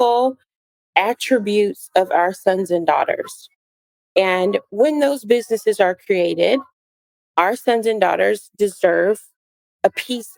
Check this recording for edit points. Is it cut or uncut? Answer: uncut